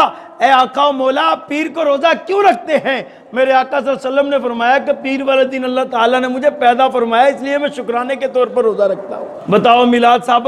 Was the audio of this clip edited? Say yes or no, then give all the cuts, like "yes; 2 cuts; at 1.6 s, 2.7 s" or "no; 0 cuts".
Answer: yes; 1 cut; at 9.3 s